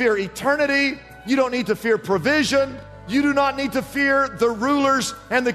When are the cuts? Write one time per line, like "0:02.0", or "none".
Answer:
0:02.9